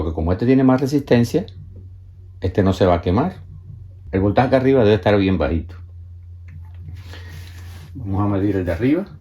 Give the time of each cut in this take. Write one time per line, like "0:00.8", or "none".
0:04.0